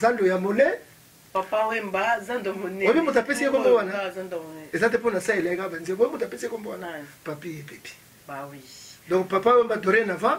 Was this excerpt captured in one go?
yes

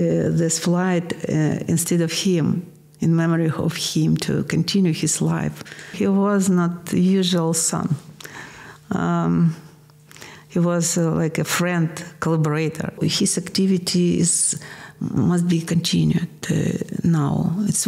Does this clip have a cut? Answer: yes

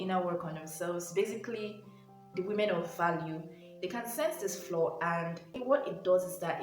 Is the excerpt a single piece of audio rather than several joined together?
no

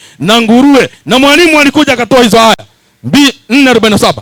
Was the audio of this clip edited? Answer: no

